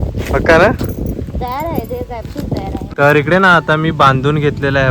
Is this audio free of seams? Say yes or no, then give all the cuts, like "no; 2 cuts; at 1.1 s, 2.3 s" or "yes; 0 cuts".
no; 1 cut; at 2.9 s